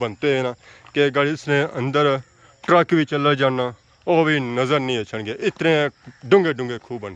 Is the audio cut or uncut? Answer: uncut